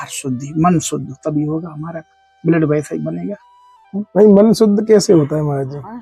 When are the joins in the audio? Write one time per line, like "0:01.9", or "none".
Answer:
none